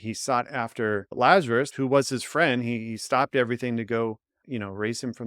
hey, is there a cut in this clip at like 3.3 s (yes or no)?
no